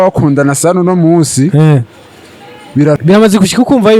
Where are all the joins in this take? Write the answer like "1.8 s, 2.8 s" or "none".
3.0 s